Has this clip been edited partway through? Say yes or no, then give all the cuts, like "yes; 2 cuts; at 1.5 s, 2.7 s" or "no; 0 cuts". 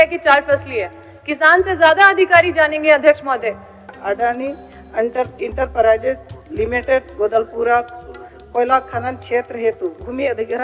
yes; 1 cut; at 3.9 s